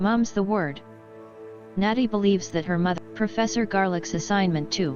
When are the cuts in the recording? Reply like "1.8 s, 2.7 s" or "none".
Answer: 3.0 s